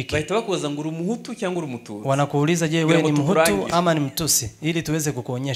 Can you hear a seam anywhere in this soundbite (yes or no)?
no